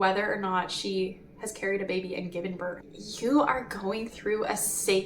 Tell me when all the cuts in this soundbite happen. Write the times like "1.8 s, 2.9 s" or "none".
2.8 s

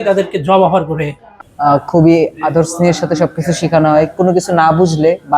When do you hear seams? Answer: 1.3 s

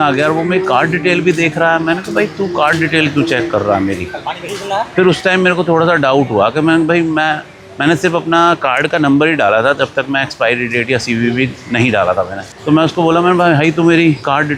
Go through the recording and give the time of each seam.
none

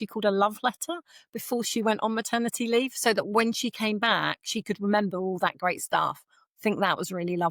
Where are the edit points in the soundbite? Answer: none

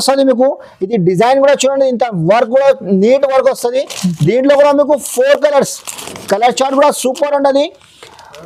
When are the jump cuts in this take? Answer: none

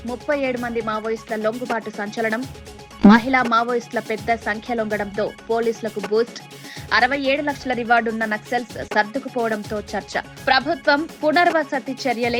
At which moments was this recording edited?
none

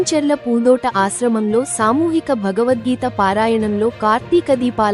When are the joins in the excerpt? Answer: none

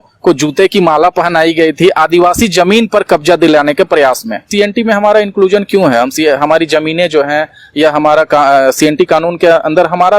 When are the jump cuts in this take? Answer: 4.4 s

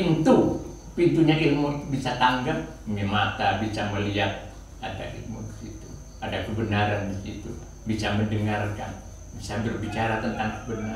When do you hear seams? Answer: none

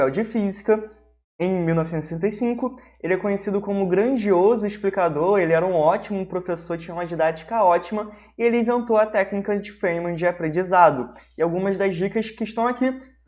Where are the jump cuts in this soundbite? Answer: none

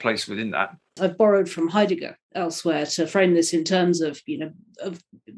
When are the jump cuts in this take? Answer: 1.0 s

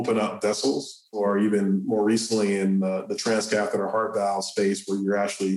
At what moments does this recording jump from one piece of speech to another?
1.2 s

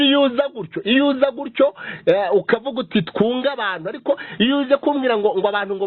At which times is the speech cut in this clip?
none

